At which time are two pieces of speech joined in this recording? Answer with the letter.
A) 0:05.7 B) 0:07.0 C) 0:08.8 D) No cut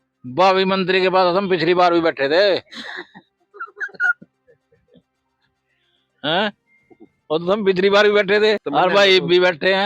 C